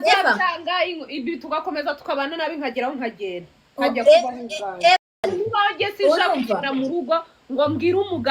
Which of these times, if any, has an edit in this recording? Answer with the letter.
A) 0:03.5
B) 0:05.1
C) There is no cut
B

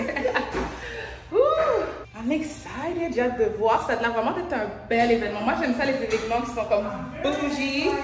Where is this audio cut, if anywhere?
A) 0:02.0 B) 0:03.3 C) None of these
A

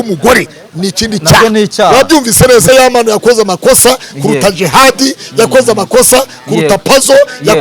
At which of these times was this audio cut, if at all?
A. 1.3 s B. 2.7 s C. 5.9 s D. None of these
B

